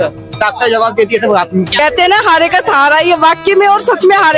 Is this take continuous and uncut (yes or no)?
no